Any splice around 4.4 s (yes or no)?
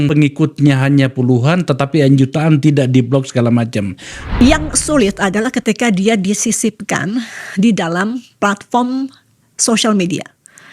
yes